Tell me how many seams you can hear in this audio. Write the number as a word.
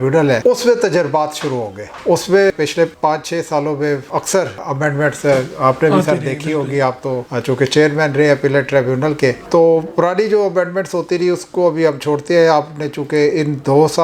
zero